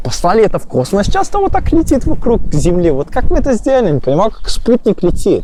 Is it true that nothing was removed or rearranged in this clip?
yes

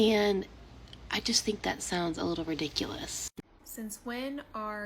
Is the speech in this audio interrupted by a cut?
yes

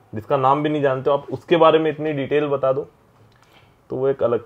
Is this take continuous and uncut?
yes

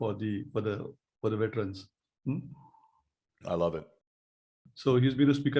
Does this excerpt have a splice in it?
yes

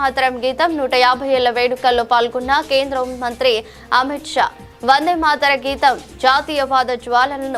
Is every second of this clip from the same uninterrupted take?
yes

